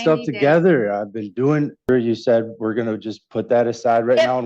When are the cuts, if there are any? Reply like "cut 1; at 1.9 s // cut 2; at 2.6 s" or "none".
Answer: cut 1; at 1.9 s